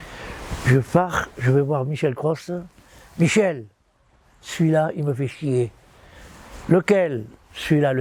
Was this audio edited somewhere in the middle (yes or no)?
no